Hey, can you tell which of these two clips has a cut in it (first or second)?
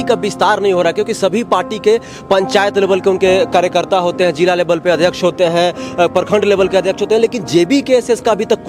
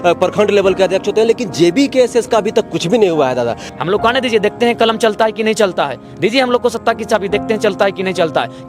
second